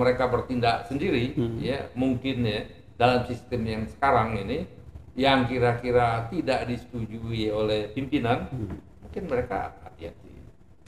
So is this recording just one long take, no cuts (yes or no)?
yes